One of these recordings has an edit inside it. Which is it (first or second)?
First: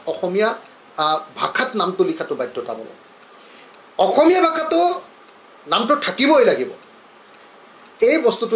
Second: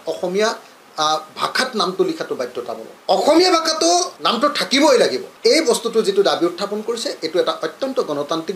second